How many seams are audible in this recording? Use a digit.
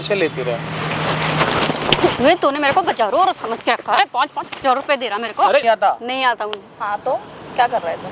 1